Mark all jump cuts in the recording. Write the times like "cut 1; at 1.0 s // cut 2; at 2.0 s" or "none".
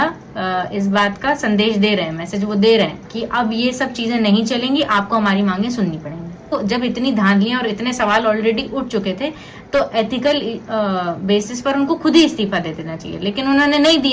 cut 1; at 3.0 s // cut 2; at 6.5 s